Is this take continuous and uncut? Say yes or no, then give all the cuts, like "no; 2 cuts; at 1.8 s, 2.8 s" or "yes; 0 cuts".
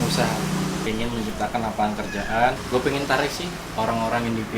no; 2 cuts; at 0.8 s, 2.6 s